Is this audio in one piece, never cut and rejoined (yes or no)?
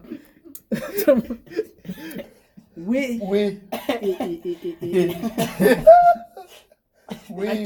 no